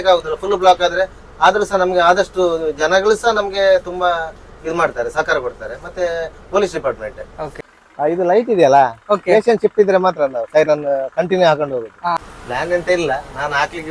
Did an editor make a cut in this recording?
yes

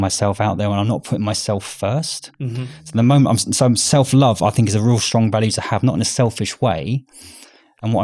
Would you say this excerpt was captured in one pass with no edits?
yes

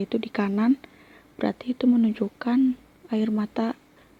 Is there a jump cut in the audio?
no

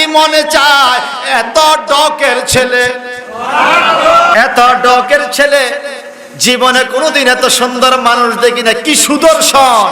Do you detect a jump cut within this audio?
yes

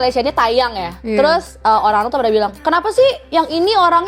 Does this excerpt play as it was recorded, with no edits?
yes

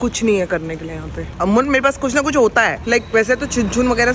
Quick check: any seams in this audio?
yes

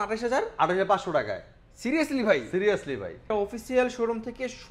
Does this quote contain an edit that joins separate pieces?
yes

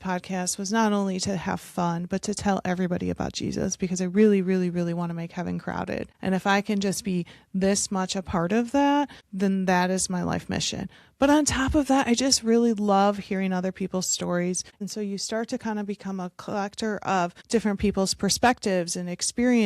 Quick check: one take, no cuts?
no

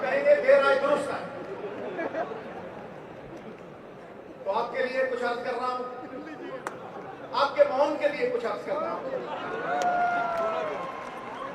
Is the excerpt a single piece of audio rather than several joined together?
yes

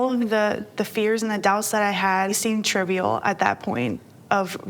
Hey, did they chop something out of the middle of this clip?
yes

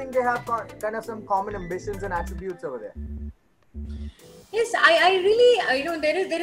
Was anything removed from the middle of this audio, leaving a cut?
no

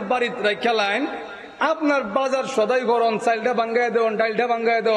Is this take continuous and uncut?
yes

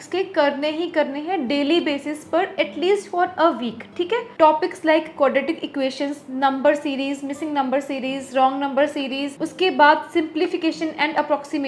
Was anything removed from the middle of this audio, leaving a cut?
no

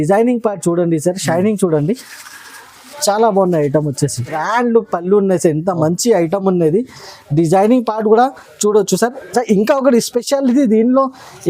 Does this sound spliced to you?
yes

